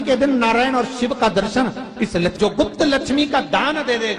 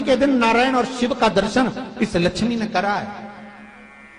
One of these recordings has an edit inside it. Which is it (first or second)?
first